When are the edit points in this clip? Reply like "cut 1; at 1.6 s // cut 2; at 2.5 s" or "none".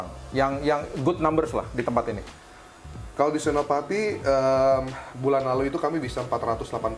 none